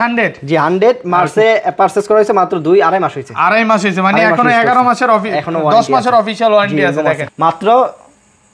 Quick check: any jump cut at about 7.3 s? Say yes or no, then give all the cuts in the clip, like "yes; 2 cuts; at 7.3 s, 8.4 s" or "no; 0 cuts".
yes; 1 cut; at 7.3 s